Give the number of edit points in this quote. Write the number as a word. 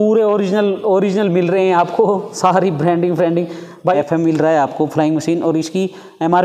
one